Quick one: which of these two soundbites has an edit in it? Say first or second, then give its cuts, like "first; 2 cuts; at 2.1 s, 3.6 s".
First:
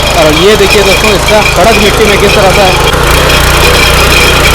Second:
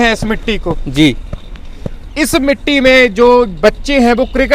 first; 1 cut; at 2.9 s